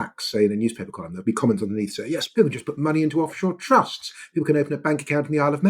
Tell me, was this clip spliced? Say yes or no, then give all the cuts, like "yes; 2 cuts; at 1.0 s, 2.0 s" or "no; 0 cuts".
yes; 2 cuts; at 1.1 s, 2.3 s